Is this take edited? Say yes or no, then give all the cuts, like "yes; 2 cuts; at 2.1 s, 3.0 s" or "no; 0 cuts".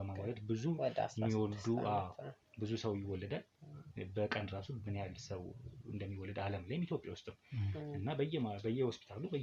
no; 0 cuts